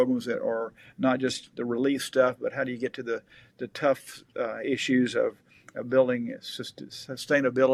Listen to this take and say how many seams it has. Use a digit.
0